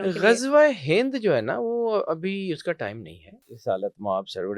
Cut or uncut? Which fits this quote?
cut